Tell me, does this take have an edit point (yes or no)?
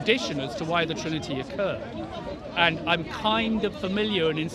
no